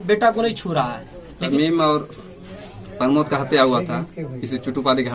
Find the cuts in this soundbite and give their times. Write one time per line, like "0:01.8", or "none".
0:01.4